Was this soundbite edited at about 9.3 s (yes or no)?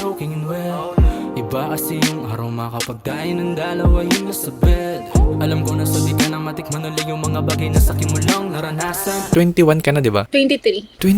yes